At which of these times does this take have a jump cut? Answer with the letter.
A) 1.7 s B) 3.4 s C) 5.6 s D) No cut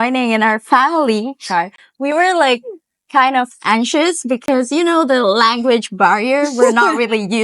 D